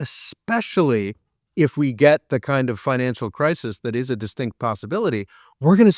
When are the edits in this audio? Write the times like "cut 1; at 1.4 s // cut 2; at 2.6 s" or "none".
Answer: none